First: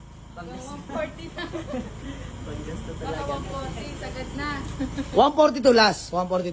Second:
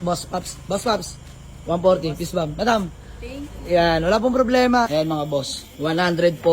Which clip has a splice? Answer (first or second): second